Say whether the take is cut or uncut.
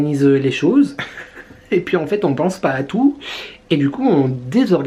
uncut